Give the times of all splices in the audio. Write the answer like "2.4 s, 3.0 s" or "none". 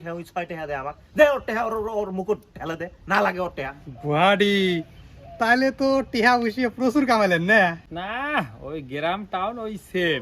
3.8 s